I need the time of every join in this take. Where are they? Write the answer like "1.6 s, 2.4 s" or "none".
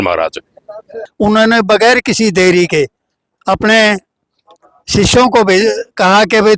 1.0 s